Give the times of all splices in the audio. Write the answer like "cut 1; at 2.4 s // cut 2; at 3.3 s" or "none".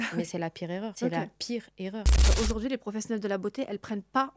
cut 1; at 0.9 s // cut 2; at 2.3 s